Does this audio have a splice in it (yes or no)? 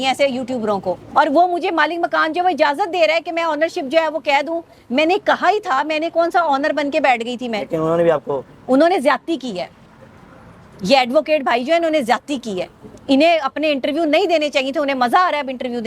yes